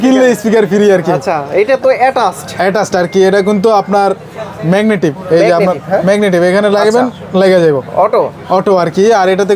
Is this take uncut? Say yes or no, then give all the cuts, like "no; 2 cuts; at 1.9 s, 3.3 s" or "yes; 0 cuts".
yes; 0 cuts